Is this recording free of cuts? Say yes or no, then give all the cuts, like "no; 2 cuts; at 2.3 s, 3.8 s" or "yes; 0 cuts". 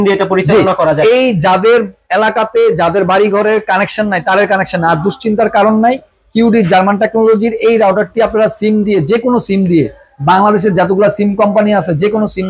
yes; 0 cuts